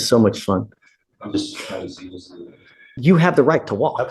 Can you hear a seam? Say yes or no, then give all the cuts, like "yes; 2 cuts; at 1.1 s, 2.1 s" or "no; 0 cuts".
yes; 1 cut; at 2.8 s